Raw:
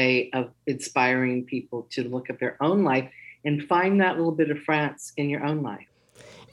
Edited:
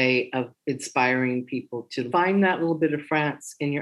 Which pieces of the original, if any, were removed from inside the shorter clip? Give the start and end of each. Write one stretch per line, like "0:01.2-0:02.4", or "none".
0:02.1-0:03.6